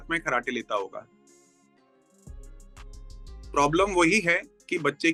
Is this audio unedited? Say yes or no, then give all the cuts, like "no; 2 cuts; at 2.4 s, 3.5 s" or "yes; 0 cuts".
yes; 0 cuts